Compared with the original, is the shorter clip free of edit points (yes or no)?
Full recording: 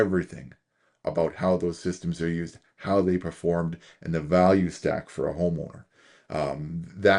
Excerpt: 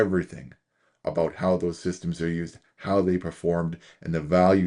yes